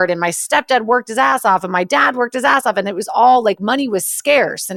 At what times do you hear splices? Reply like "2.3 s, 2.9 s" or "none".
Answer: none

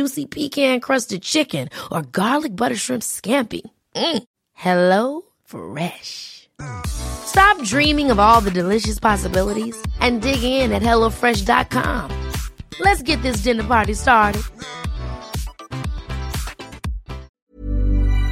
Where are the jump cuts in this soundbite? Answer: 17.3 s

